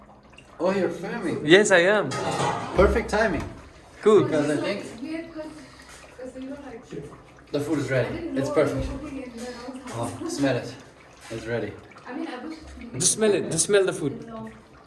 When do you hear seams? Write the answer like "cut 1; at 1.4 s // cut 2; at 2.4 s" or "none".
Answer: none